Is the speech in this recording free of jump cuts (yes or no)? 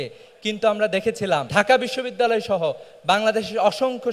no